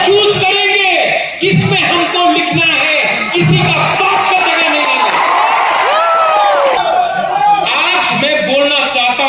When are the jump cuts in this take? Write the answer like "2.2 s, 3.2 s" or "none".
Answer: 6.8 s